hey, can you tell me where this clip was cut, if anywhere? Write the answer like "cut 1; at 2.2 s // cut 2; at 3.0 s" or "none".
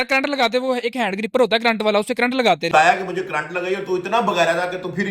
cut 1; at 2.7 s